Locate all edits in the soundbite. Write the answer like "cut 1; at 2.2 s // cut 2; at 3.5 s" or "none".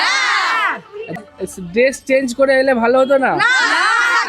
cut 1; at 1.2 s